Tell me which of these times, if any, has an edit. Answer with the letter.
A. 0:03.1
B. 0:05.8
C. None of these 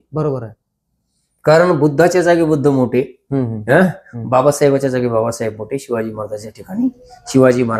C